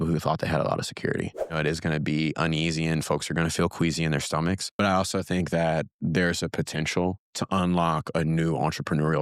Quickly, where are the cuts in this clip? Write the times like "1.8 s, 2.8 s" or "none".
1.5 s, 4.7 s, 7.3 s